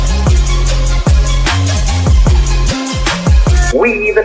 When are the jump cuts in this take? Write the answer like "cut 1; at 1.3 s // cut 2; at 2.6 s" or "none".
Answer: none